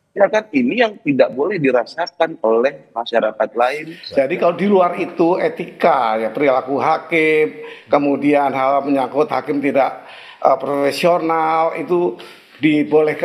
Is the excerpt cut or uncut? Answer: cut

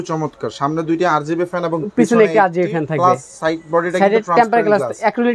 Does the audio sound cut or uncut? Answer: uncut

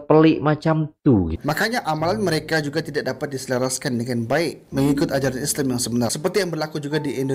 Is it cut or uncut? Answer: cut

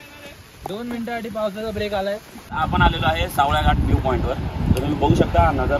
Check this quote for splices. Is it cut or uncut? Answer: cut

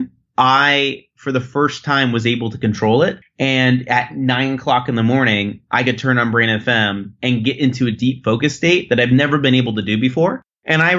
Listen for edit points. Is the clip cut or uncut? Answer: uncut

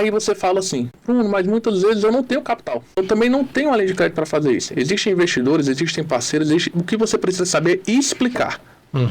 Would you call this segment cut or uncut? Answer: cut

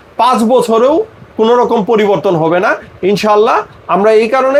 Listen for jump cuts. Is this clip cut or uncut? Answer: uncut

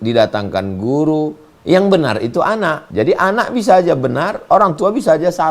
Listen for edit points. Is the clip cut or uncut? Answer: cut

